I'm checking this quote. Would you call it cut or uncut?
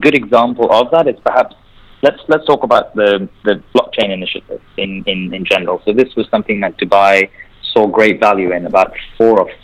uncut